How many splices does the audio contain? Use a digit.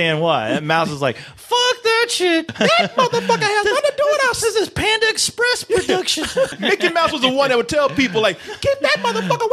2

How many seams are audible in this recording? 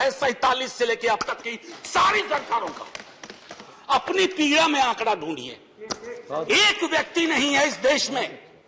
1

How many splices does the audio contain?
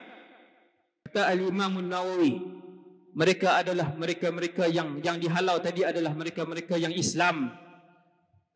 1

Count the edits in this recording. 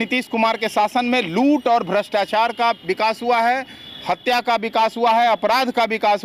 0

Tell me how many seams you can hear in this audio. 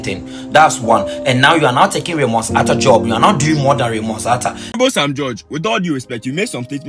1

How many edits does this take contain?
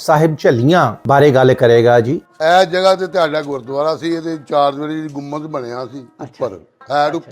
2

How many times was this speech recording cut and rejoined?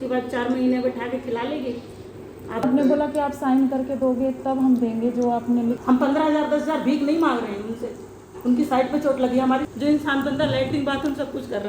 3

